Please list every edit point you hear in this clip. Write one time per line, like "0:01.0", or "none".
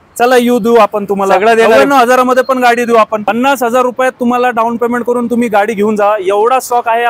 0:03.3